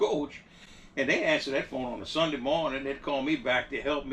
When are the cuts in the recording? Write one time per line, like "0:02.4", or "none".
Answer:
none